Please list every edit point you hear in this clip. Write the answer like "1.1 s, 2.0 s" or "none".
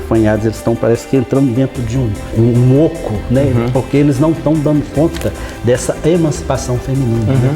2.3 s